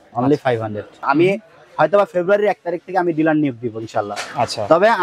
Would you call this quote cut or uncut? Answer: cut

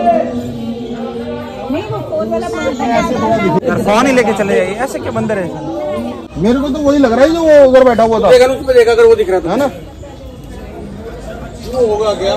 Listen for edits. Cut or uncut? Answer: cut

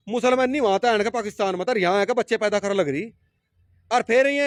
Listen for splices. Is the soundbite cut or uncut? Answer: uncut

